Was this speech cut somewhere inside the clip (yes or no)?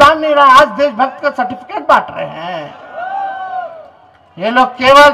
no